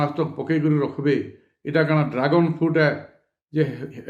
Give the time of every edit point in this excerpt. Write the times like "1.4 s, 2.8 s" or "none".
none